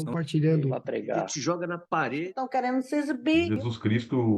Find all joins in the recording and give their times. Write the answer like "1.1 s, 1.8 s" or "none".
none